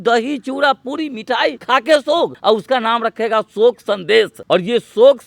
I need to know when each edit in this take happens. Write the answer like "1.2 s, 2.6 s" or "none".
1.6 s, 2.4 s, 4.4 s

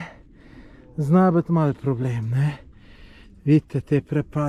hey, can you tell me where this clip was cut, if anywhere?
none

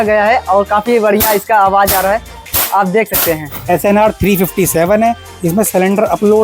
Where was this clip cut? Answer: 3.5 s

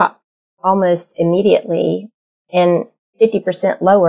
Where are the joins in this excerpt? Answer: none

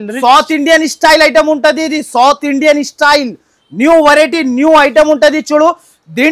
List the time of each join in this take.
none

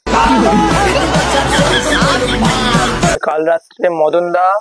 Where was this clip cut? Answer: 3.2 s

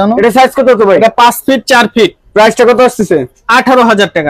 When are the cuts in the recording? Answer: none

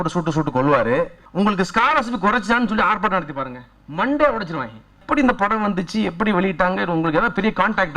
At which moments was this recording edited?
1.2 s, 5.0 s

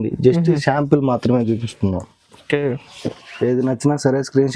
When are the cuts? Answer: 2.9 s

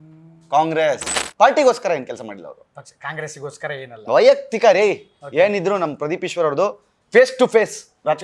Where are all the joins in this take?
1.2 s

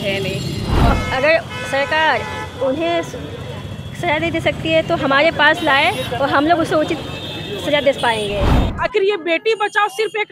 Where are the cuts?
0.9 s, 8.6 s

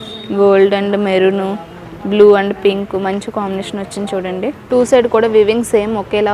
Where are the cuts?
4.6 s

